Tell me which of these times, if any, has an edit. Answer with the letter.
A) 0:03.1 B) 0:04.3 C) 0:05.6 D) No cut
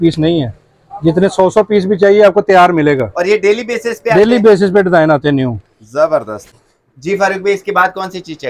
D